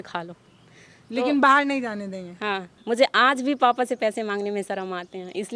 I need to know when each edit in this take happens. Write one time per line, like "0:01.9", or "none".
0:02.7